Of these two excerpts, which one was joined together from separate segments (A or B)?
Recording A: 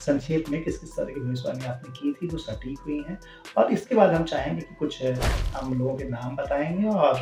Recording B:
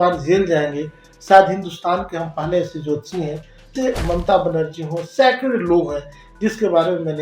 B